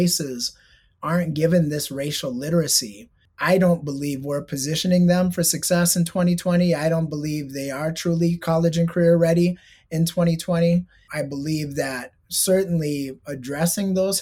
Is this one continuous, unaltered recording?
yes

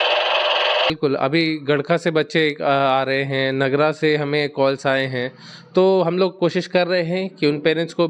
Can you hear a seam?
yes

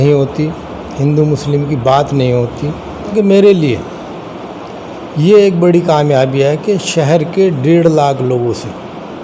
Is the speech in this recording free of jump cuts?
no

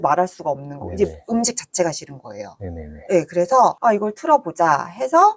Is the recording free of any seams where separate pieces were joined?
yes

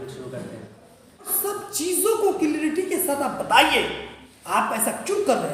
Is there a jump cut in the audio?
yes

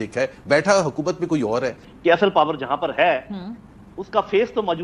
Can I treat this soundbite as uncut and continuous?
no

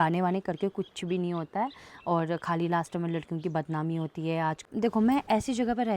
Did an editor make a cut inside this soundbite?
yes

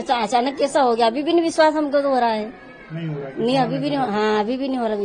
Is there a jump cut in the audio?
no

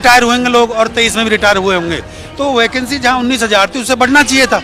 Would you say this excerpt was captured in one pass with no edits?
yes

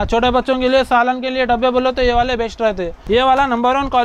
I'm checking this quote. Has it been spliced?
yes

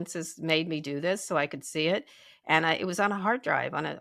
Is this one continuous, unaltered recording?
yes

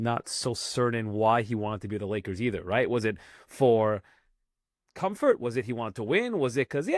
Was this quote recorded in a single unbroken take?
yes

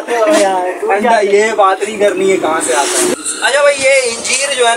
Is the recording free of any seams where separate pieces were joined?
no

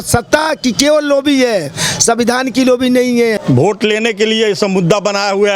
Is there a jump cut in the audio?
yes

